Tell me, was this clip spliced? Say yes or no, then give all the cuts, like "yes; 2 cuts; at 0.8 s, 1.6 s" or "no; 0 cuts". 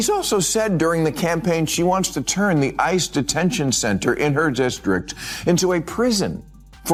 no; 0 cuts